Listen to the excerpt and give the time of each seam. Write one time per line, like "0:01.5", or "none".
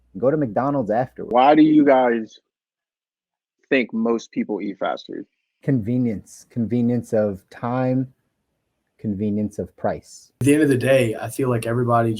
0:01.3
0:10.4